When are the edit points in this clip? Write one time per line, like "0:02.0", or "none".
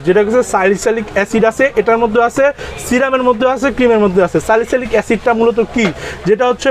none